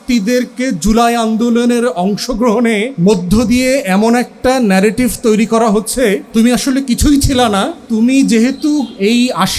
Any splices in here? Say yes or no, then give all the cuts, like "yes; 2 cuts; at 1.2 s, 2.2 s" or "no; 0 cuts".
yes; 3 cuts; at 2.9 s, 6.2 s, 7.8 s